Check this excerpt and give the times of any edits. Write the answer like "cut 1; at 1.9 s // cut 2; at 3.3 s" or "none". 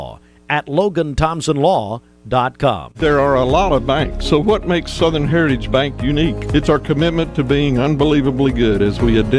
cut 1; at 2.9 s